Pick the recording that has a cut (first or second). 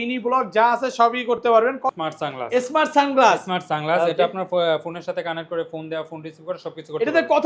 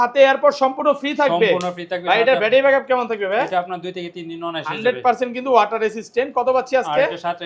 first